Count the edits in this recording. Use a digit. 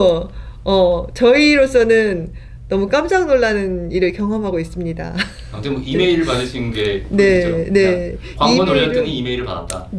0